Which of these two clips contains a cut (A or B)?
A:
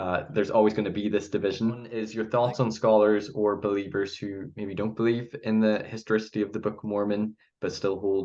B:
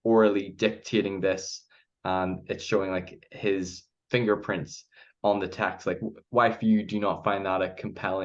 A